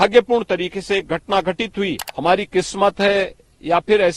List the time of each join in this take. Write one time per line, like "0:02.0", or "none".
0:02.1